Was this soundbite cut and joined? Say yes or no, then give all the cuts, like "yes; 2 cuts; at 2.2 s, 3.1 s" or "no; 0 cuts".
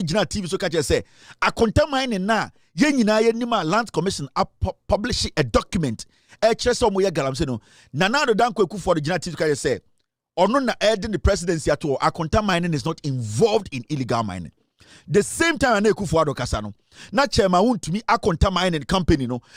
no; 0 cuts